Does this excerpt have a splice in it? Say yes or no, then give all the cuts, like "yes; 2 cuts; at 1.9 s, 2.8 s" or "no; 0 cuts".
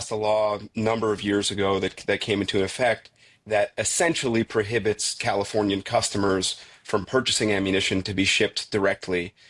no; 0 cuts